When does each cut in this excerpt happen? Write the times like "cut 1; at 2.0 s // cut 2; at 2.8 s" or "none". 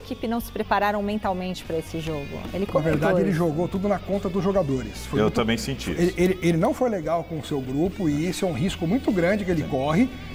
none